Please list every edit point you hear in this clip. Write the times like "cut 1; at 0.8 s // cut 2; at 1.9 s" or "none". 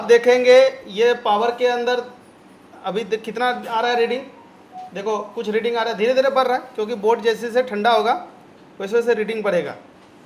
none